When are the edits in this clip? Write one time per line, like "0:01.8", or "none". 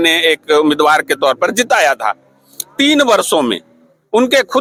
none